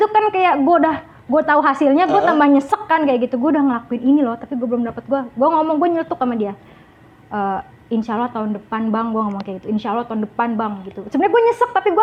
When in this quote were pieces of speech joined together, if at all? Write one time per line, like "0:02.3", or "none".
none